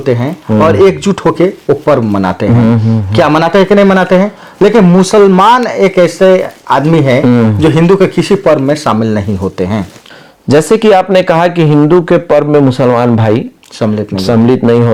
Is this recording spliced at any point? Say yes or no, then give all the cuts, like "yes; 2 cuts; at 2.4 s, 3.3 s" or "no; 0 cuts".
no; 0 cuts